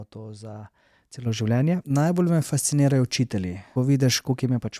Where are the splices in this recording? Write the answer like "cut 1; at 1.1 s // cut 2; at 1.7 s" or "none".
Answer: cut 1; at 1.8 s // cut 2; at 3.6 s